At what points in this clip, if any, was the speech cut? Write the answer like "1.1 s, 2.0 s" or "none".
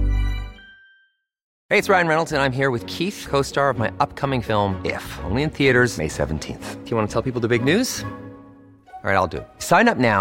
1.4 s